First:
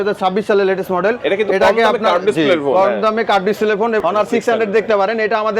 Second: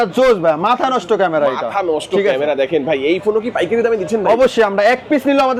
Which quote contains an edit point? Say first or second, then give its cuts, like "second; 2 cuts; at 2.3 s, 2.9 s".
first; 1 cut; at 4.0 s